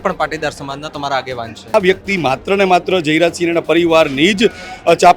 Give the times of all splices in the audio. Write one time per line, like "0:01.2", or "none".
0:01.7

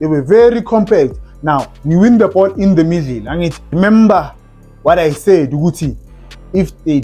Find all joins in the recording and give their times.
0:03.6

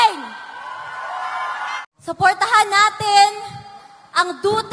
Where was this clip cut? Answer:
0:01.8

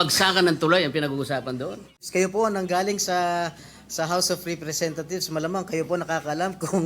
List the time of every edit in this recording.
0:01.9

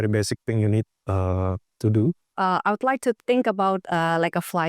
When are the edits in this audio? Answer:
0:02.3

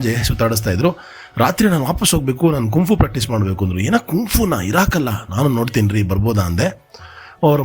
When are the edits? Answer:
none

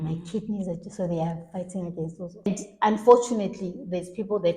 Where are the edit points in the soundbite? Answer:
0:02.5

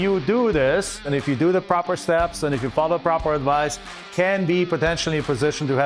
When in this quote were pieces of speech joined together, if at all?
0:01.0

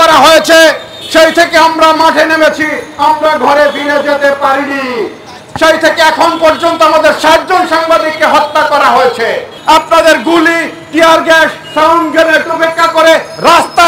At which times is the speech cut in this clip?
0:09.5

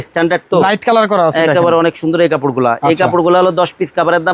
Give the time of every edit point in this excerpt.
none

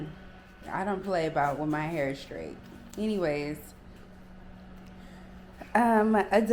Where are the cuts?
none

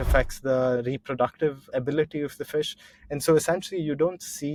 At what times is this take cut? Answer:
none

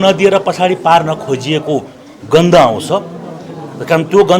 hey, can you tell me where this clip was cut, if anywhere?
none

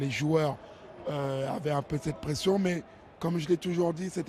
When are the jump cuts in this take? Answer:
0:02.9

